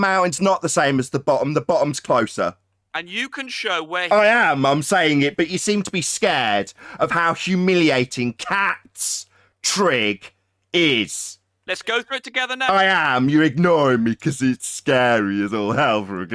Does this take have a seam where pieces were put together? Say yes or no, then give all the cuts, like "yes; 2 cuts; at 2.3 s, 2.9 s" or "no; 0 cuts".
no; 0 cuts